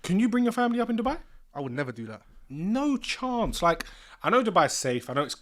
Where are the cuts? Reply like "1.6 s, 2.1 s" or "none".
none